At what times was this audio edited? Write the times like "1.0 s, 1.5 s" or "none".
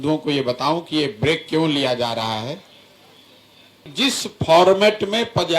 3.8 s